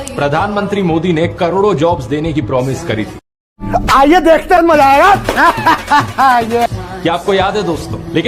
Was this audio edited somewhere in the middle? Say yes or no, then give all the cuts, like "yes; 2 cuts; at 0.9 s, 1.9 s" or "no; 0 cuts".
no; 0 cuts